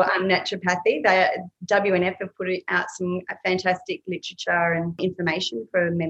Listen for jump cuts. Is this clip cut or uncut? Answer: uncut